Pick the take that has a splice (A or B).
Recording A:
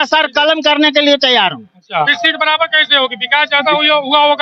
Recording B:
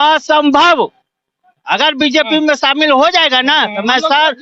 A